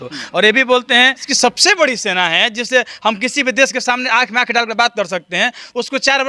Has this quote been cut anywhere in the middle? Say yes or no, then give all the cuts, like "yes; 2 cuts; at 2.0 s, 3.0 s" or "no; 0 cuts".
yes; 1 cut; at 1.3 s